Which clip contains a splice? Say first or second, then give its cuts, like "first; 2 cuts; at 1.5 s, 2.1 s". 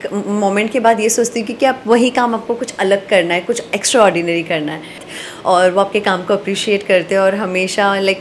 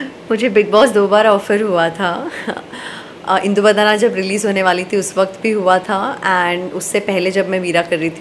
first; 1 cut; at 5.0 s